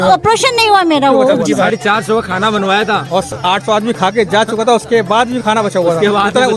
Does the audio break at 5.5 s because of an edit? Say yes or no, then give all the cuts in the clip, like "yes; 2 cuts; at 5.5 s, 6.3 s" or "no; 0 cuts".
no; 1 cut; at 1.7 s